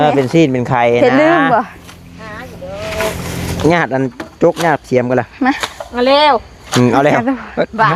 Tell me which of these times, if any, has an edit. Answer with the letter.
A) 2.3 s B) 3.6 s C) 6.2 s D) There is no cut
B